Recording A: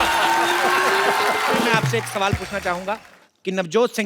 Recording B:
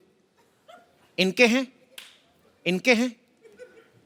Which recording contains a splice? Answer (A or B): A